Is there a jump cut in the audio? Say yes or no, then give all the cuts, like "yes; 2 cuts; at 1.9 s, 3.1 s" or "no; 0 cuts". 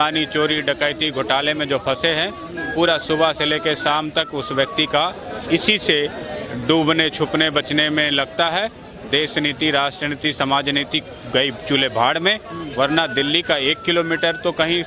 no; 0 cuts